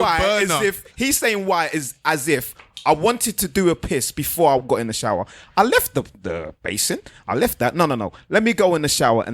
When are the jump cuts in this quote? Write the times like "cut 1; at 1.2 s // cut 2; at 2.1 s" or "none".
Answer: cut 1; at 4.6 s